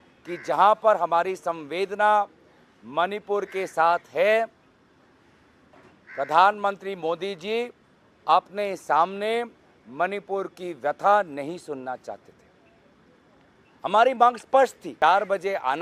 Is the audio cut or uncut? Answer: cut